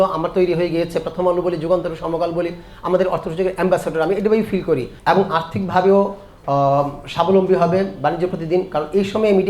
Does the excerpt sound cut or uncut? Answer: cut